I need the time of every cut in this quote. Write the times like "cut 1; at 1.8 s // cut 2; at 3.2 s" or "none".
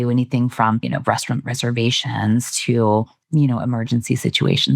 cut 1; at 0.9 s // cut 2; at 3.2 s

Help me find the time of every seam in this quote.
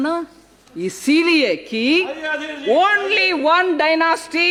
none

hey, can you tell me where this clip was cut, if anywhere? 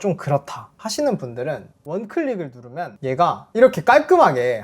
cut 1; at 1.7 s

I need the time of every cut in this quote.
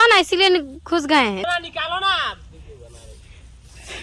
cut 1; at 1.4 s

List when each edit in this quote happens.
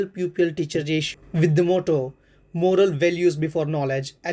cut 1; at 1.1 s

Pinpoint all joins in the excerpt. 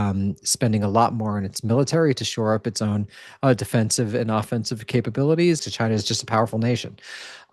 cut 1; at 5.6 s

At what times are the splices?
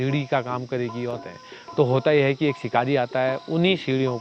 cut 1; at 1.2 s

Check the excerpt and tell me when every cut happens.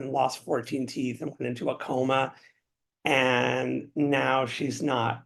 none

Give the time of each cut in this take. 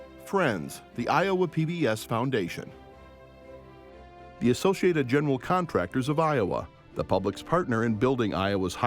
cut 1; at 2.6 s // cut 2; at 4.4 s

